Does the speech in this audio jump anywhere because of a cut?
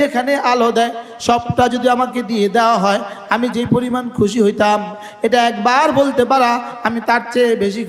no; 0 cuts

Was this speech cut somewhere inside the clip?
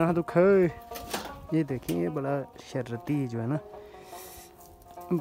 no; 0 cuts

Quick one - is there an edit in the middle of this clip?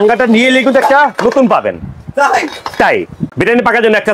yes; 1 cut; at 3.2 s

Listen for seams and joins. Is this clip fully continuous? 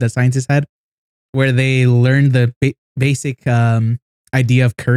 yes; 0 cuts

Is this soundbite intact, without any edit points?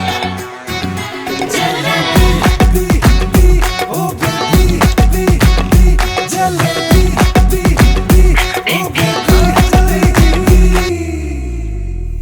no; 1 cut; at 10.9 s

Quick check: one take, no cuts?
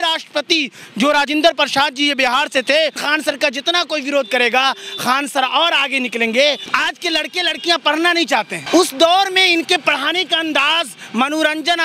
no; 3 cuts; at 3.0 s, 6.7 s, 8.6 s

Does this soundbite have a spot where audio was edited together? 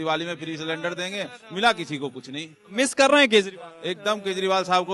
no; 0 cuts

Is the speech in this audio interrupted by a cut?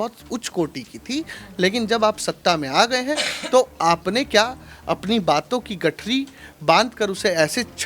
no; 0 cuts

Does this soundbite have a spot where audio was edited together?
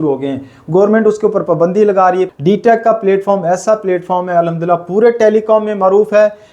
yes; 1 cut; at 2.3 s

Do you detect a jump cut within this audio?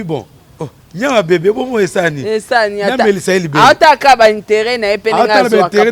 no; 0 cuts

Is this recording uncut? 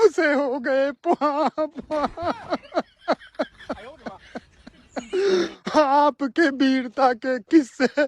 yes; 0 cuts

